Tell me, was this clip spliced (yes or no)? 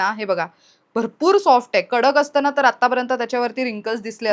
no